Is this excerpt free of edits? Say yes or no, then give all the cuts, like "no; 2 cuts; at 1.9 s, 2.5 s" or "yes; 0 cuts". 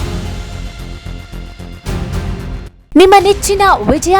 yes; 0 cuts